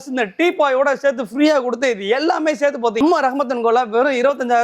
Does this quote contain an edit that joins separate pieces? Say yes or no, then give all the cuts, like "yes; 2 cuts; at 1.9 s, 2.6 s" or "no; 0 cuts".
no; 0 cuts